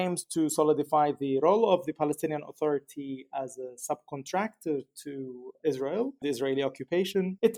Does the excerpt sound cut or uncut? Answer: uncut